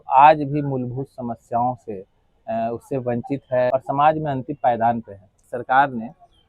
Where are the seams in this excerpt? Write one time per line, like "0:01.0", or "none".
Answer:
0:03.7
0:05.5